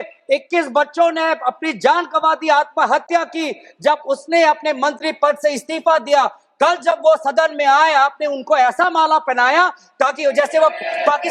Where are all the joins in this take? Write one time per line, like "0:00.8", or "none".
none